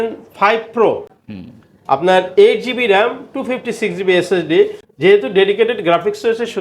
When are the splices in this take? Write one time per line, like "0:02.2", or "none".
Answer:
none